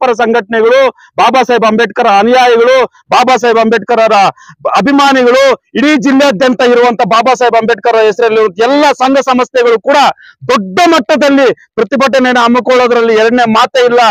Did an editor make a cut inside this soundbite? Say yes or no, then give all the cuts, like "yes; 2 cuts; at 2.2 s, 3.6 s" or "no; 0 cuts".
no; 0 cuts